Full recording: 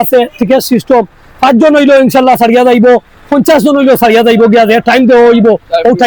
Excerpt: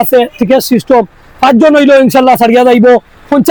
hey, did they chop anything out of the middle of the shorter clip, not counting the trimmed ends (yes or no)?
no